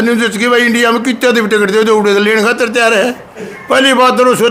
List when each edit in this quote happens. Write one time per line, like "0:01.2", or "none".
none